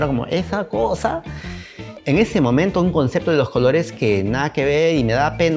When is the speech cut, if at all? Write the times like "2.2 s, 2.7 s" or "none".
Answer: 1.9 s

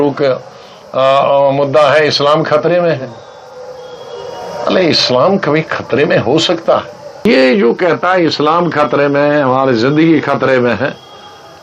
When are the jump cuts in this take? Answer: 7.3 s

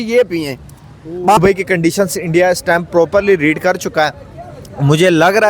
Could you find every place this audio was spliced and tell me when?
1.4 s

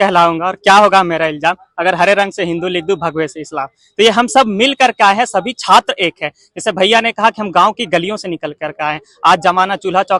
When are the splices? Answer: none

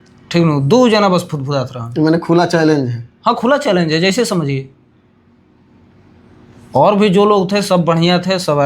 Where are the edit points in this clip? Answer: none

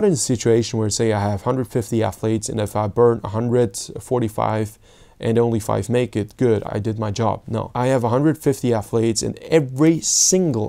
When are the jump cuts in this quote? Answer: 6.7 s, 7.7 s

